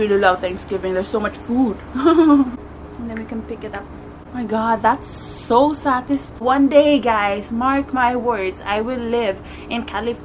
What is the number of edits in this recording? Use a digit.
3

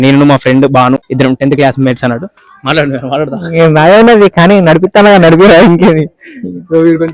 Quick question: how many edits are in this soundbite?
1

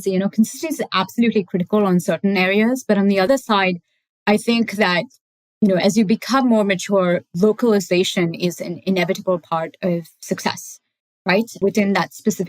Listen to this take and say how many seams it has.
2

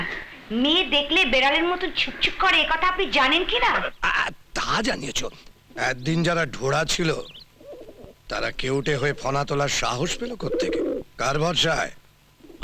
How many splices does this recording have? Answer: 1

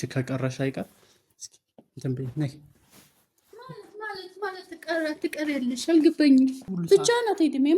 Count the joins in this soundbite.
1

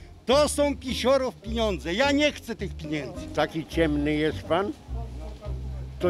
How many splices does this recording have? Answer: 1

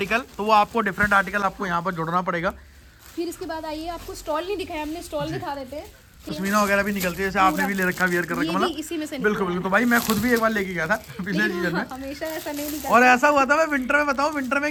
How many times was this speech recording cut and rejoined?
0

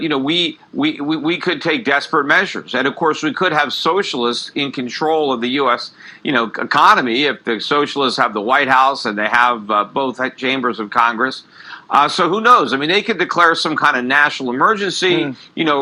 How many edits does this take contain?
0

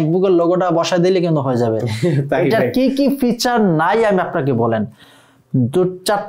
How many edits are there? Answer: 0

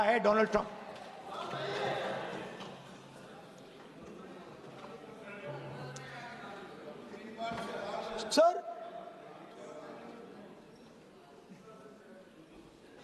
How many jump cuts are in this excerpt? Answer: 0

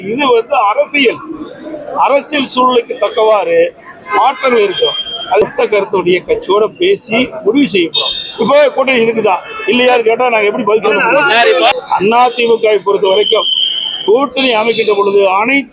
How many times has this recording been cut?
2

